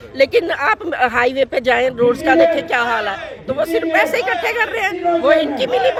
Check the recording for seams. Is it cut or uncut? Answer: uncut